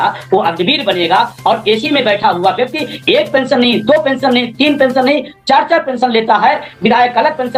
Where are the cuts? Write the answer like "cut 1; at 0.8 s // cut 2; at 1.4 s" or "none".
none